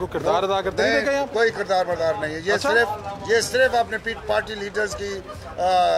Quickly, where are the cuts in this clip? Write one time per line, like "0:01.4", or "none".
none